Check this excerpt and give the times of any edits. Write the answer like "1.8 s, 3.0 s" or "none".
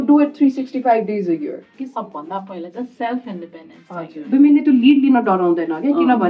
1.7 s, 4.3 s

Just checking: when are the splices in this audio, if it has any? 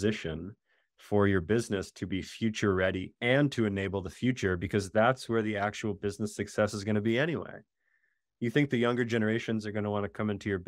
none

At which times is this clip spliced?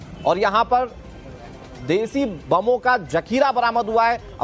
none

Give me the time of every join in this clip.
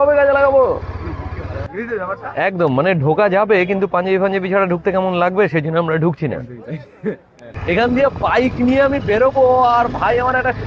1.6 s, 7.5 s

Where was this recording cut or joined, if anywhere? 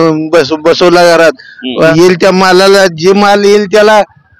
1.9 s

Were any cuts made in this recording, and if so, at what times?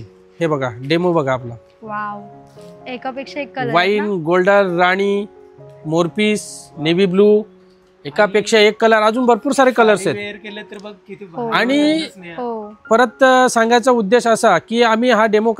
none

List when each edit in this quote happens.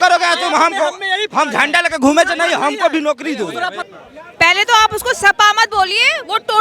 3.9 s

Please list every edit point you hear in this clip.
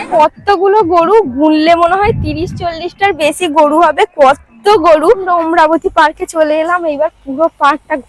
5.2 s

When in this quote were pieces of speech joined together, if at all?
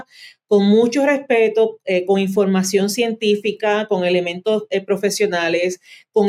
none

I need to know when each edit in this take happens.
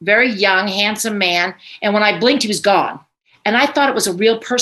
3.3 s

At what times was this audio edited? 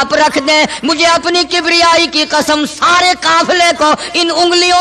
none

